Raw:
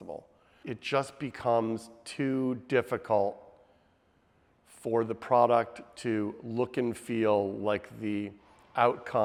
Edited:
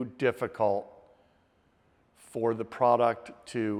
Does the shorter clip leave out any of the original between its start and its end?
no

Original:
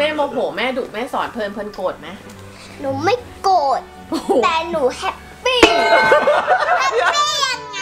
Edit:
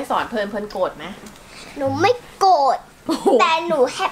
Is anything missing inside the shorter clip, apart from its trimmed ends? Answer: no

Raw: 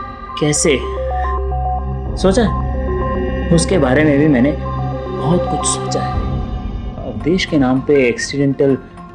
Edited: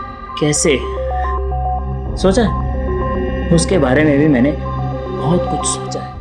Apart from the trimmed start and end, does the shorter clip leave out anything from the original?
no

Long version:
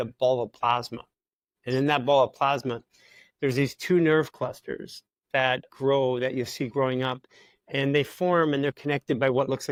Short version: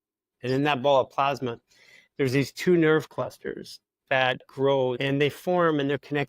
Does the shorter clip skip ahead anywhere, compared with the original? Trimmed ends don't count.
yes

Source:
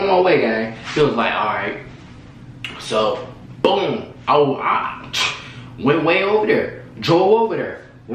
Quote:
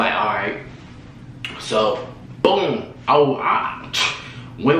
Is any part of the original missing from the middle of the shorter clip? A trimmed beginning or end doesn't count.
no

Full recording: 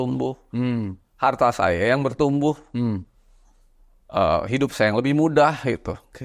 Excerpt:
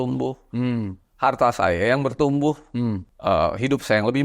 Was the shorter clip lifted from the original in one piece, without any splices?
no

